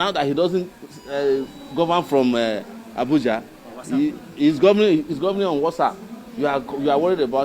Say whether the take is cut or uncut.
uncut